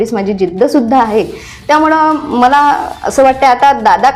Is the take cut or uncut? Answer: uncut